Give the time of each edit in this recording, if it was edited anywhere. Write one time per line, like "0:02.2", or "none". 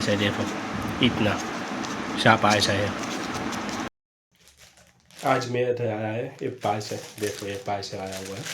0:04.4